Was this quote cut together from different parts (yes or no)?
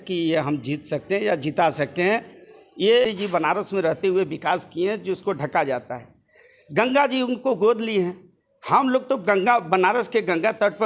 yes